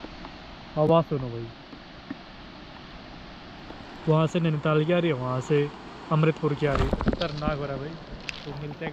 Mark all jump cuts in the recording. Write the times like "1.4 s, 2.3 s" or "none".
none